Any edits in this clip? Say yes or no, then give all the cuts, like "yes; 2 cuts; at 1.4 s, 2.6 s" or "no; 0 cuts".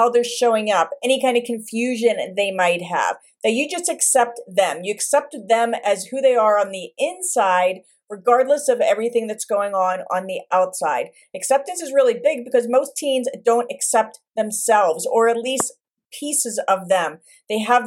no; 0 cuts